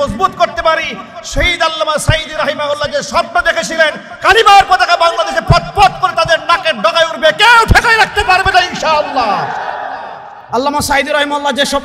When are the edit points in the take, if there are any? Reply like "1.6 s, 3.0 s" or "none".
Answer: 10.4 s